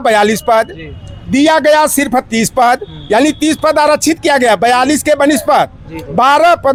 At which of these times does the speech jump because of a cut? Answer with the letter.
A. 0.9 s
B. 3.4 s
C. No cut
C